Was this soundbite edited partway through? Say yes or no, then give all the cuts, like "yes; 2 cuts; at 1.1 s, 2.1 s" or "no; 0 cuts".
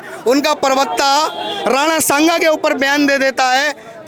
no; 0 cuts